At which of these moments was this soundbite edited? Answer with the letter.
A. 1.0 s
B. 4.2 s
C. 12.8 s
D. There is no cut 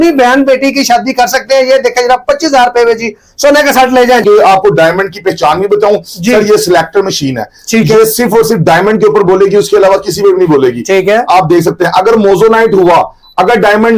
B